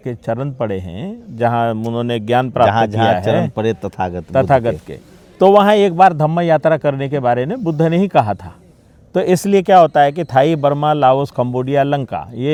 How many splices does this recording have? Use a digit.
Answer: 0